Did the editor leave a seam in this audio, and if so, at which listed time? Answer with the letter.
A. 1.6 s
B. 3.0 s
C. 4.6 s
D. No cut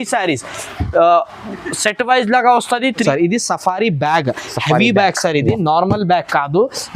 B